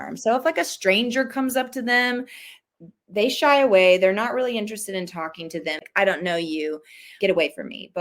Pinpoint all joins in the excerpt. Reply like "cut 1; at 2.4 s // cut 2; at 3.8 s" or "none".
cut 1; at 5.8 s // cut 2; at 7.1 s